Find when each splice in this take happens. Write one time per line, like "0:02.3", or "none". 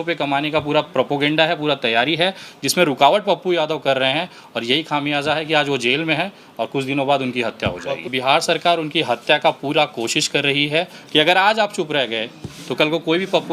0:08.0
0:11.0